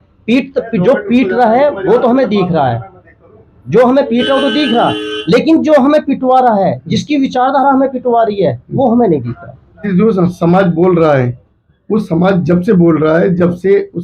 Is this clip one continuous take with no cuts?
no; 1 cut; at 9.9 s

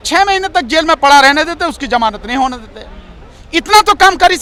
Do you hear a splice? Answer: no; 0 cuts

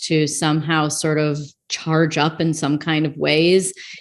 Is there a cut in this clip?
no; 0 cuts

